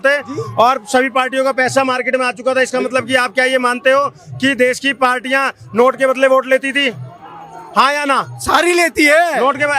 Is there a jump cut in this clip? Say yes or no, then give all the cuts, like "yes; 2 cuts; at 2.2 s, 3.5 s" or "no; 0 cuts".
no; 0 cuts